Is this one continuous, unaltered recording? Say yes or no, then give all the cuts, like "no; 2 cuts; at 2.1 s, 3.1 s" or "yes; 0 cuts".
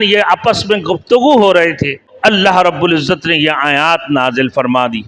no; 1 cut; at 2.1 s